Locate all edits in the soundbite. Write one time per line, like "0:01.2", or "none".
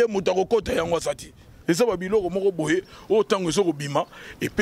0:01.5

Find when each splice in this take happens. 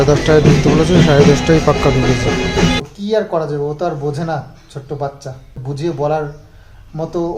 0:02.8
0:05.6

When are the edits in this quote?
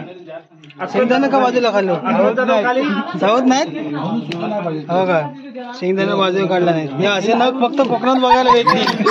none

